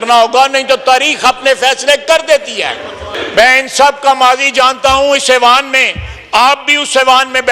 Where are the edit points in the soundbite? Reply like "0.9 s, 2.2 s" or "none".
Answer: 3.2 s

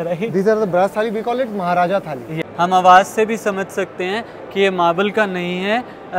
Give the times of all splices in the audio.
2.3 s

